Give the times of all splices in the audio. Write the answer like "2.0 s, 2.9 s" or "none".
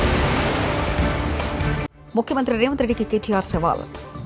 1.9 s